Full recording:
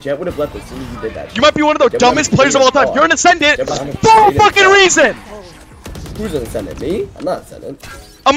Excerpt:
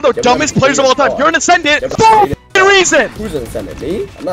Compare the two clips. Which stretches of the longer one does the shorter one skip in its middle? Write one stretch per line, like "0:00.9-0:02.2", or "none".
0:03.6-0:03.9
0:05.2-0:06.1